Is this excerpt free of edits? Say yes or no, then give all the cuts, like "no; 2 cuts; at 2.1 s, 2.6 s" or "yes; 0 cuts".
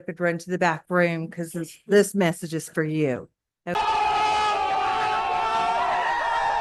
yes; 0 cuts